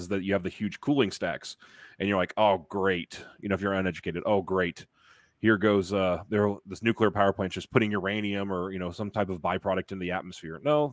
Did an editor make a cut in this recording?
no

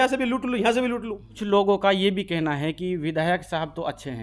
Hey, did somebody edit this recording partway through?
yes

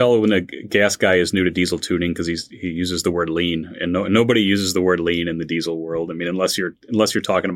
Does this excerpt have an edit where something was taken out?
no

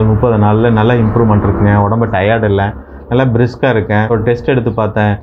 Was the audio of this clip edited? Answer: no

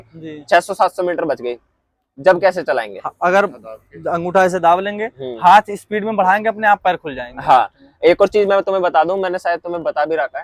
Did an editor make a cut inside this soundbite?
no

